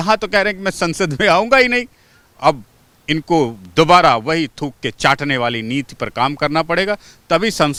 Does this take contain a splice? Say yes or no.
no